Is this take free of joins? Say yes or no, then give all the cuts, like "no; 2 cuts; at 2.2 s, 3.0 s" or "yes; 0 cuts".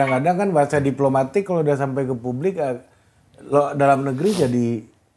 yes; 0 cuts